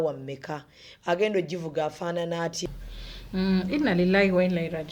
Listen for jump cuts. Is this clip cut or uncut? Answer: cut